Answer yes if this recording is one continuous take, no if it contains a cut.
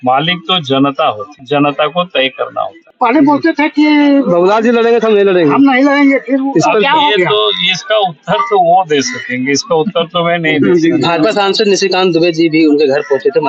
no